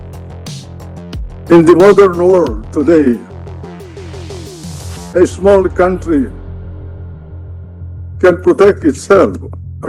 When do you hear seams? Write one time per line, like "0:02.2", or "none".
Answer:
0:03.3
0:04.8